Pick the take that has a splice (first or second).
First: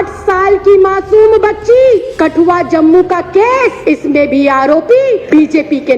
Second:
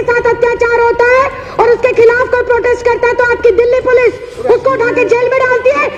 first